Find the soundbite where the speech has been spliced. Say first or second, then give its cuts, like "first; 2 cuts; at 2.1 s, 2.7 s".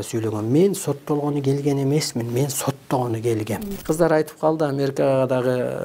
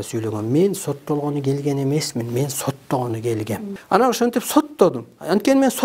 first; 1 cut; at 3.7 s